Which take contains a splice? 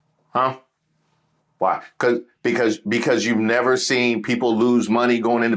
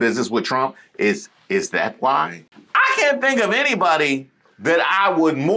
second; 1 cut; at 2.6 s

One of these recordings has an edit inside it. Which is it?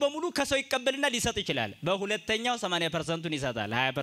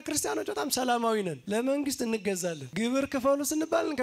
second; 2 cuts; at 1.4 s, 2.6 s

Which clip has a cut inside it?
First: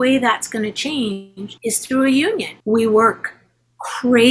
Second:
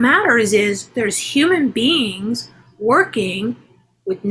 first; 2 cuts; at 1.4 s, 2.5 s

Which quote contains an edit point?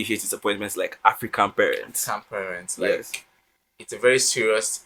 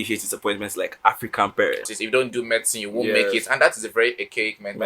second; 1 cut; at 2.0 s

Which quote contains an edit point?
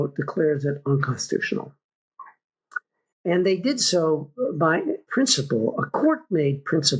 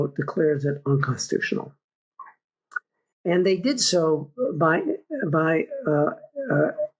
first; 1 cut; at 5.0 s

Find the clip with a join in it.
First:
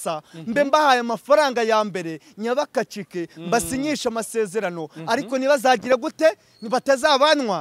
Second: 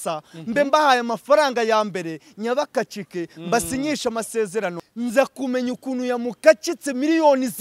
second; 1 cut; at 4.8 s

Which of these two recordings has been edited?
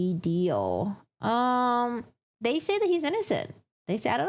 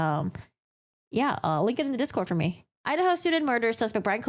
second; 1 cut; at 2.7 s

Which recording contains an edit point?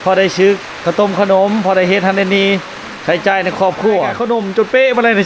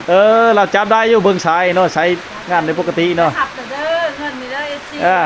first; 1 cut; at 4.2 s

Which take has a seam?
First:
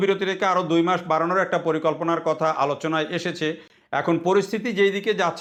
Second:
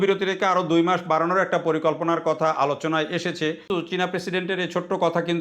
second; 1 cut; at 3.9 s

